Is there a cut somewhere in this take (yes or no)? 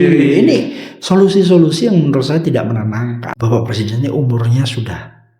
yes